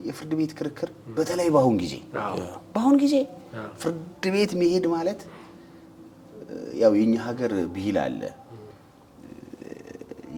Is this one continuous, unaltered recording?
yes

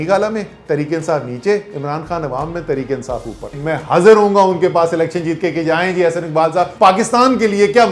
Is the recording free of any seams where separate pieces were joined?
no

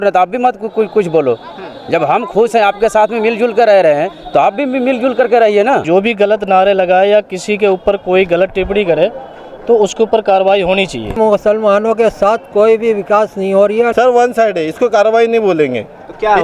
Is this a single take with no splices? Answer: no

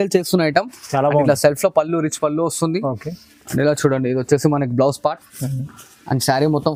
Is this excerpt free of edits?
yes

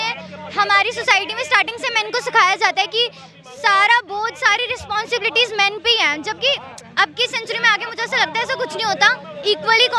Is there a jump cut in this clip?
no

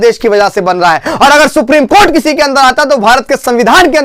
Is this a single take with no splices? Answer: yes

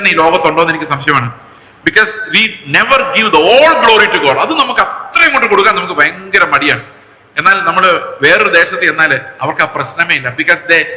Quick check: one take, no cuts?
yes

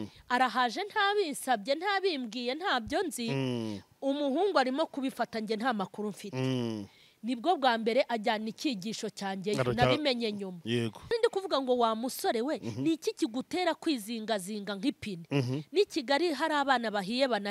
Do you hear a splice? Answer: yes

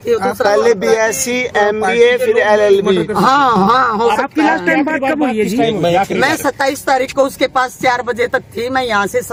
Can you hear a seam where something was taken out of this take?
no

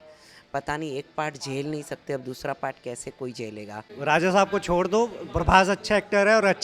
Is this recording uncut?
no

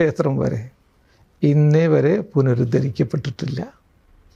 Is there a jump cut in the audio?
no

